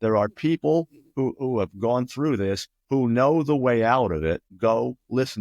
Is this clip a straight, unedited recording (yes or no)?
no